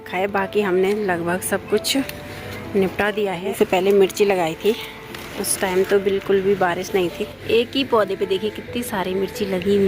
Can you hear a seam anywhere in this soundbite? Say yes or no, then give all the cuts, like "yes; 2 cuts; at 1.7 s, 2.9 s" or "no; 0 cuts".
yes; 2 cuts; at 3.5 s, 7.3 s